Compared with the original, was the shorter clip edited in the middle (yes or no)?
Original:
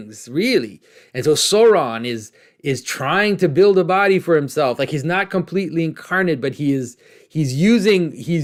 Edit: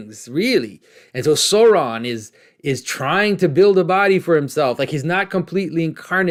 no